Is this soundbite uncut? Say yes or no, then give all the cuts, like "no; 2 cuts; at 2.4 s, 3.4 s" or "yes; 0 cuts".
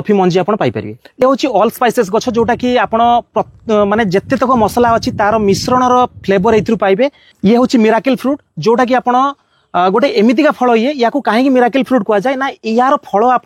no; 1 cut; at 7.3 s